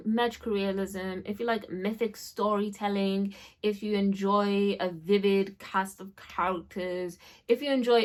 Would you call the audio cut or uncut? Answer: uncut